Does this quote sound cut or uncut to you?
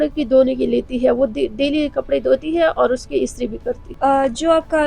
uncut